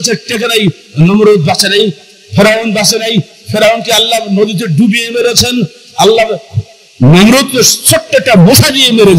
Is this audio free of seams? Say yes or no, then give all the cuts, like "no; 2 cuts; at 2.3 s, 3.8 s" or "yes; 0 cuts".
yes; 0 cuts